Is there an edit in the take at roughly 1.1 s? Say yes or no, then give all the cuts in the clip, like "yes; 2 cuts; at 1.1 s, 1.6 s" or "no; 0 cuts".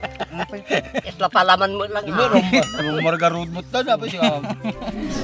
yes; 1 cut; at 1.1 s